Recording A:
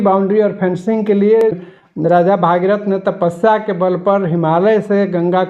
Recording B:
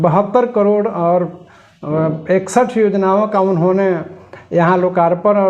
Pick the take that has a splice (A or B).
A